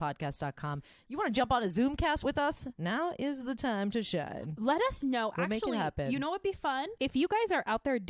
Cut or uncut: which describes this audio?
cut